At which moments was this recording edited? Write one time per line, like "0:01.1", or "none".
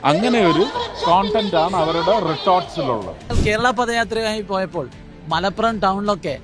0:03.3

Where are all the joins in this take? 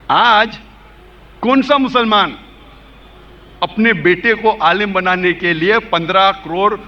none

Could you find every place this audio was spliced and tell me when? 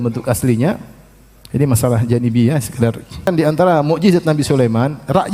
0:03.3

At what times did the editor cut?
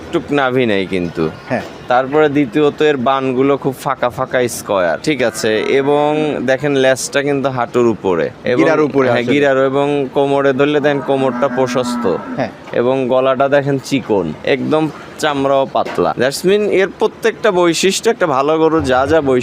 0:05.0
0:08.4
0:14.4
0:16.1

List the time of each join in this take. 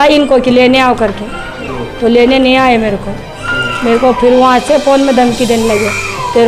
none

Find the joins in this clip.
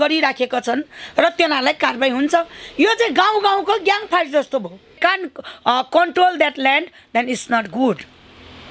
0:05.0

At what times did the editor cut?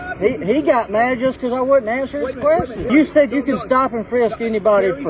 0:02.8

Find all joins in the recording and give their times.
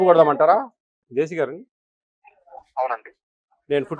0:01.0

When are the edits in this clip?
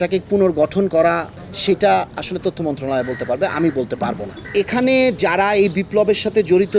0:01.3
0:04.4

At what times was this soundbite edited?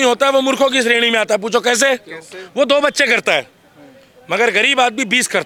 none

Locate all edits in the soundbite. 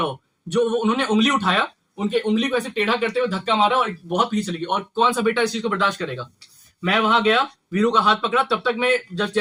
none

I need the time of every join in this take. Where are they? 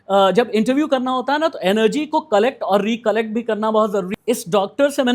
0:04.1

